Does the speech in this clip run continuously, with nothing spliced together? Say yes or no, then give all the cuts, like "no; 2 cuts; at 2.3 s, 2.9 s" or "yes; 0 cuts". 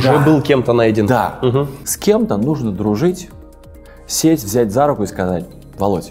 no; 1 cut; at 1.8 s